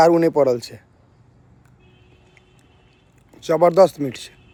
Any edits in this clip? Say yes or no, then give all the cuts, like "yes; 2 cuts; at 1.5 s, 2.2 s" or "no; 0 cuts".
no; 0 cuts